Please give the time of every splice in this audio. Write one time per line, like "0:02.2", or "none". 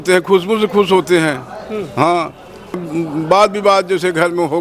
0:02.7